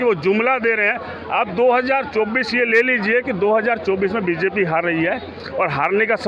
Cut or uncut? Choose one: uncut